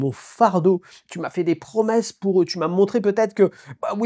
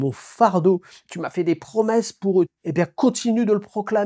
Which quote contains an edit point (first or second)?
second